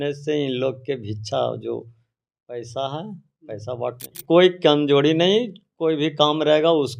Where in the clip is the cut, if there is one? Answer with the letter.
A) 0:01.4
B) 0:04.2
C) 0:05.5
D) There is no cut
B